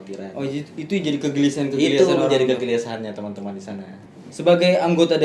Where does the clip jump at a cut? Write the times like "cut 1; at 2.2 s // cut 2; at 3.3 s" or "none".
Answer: cut 1; at 4.0 s